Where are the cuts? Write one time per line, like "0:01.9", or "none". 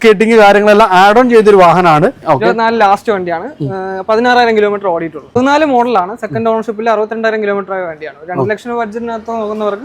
0:02.4
0:05.2